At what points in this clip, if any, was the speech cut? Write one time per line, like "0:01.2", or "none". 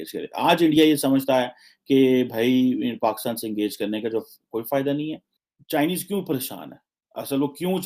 0:05.6